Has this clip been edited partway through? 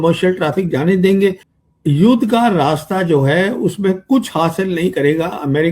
yes; 1 cut; at 1.5 s

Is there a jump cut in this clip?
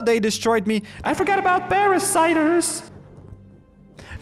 no; 0 cuts

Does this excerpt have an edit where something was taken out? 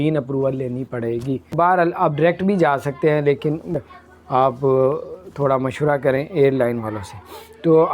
yes; 2 cuts; at 1.5 s, 3.8 s

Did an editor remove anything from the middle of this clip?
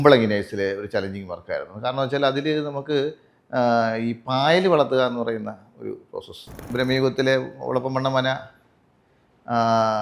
yes; 1 cut; at 6.7 s

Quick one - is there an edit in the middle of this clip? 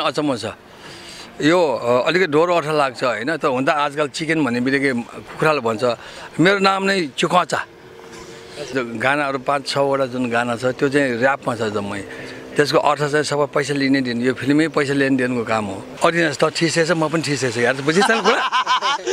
yes; 2 cuts; at 8.7 s, 15.8 s

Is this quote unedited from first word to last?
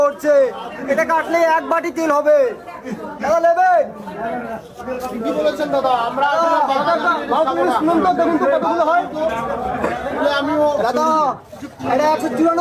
yes; 0 cuts

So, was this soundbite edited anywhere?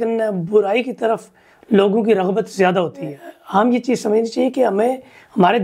no; 0 cuts

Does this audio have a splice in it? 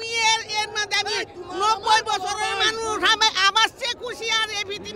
no; 0 cuts

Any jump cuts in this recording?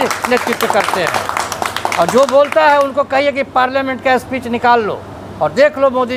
no; 0 cuts

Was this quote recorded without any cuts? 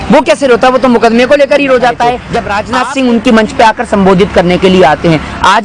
no; 1 cut; at 2.3 s

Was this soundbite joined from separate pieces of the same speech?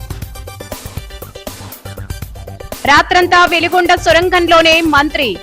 yes; 1 cut; at 1.6 s

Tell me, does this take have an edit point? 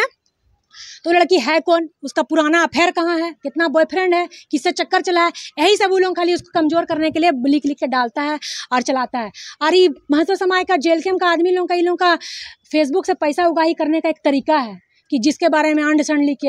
no; 0 cuts

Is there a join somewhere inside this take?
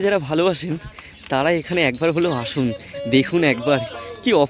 no; 0 cuts

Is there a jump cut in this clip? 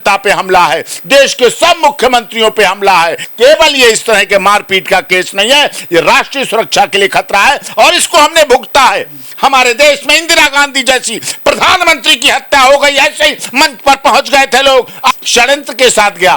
yes; 2 cuts; at 3.2 s, 15.1 s

